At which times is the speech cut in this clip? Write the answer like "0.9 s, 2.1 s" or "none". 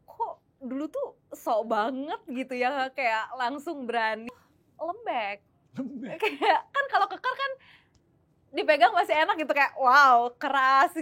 4.3 s